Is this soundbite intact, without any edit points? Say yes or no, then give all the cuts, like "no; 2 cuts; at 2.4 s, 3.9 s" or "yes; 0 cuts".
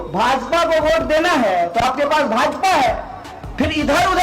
yes; 0 cuts